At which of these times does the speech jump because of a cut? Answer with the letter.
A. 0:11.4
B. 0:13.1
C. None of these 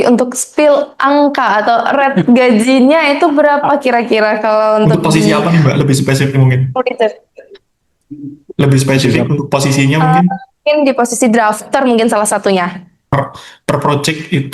B